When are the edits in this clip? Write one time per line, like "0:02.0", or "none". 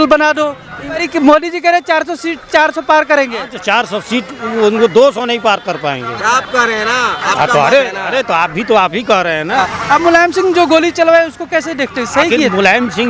0:01.1
0:09.6